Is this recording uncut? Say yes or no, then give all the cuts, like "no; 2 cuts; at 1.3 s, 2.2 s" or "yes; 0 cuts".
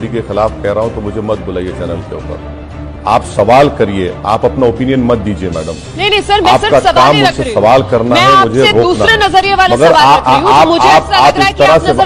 yes; 0 cuts